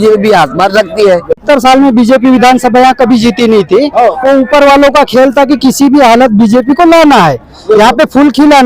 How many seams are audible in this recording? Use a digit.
1